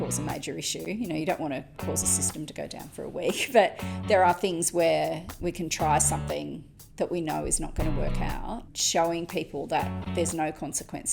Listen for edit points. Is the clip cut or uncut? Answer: cut